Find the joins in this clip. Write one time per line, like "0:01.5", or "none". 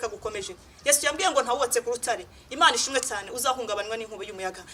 none